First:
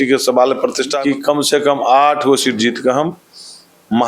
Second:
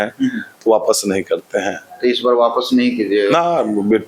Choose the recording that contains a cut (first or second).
first